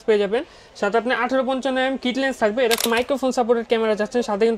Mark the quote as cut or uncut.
cut